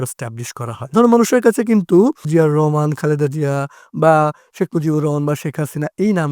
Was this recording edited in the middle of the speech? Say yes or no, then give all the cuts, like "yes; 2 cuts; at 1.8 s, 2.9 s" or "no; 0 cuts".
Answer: yes; 2 cuts; at 0.8 s, 2.3 s